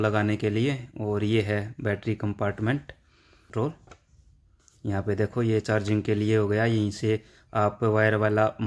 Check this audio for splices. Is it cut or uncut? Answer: cut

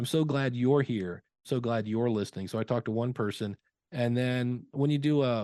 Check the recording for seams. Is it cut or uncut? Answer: cut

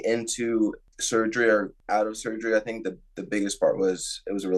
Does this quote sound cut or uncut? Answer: cut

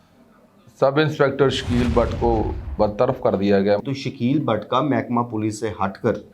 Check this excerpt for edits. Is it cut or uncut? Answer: cut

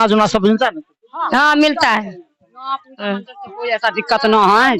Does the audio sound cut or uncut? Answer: uncut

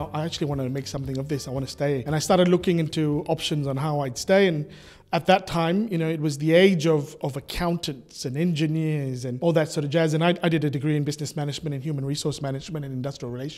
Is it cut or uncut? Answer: uncut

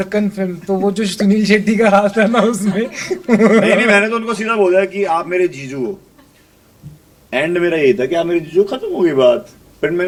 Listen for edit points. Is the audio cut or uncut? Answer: uncut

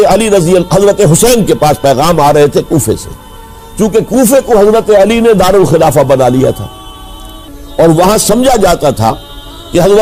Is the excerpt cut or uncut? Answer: uncut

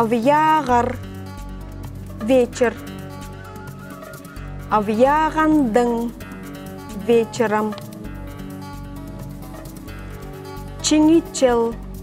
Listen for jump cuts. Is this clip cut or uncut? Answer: uncut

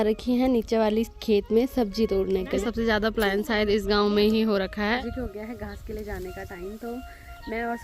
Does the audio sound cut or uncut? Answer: cut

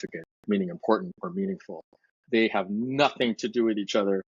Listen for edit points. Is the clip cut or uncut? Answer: uncut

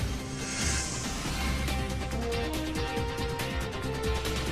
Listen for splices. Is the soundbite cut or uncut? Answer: uncut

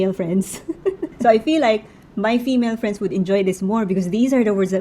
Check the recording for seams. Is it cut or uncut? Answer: cut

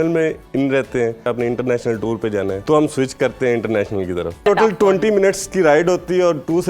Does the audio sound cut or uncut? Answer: cut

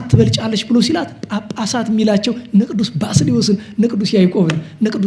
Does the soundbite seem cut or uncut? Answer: uncut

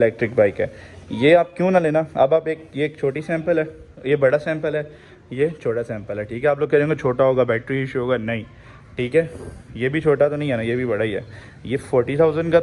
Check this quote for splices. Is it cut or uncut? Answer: uncut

